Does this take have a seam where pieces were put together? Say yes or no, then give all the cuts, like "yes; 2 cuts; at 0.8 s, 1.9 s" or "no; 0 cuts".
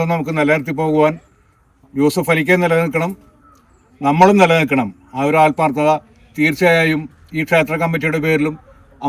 no; 0 cuts